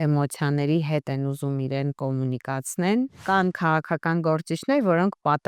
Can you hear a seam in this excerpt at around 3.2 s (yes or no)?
yes